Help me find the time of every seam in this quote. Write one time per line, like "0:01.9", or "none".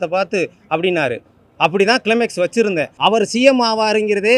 0:02.9